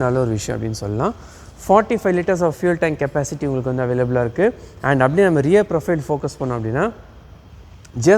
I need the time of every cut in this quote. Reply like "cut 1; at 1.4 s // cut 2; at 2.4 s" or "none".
none